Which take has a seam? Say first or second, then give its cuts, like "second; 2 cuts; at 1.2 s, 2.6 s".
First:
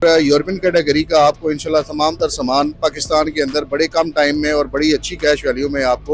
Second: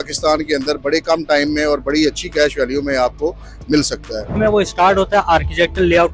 second; 1 cut; at 4.2 s